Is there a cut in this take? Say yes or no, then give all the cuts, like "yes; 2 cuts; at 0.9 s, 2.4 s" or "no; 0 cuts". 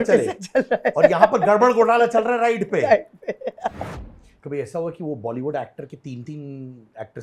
yes; 1 cut; at 3.9 s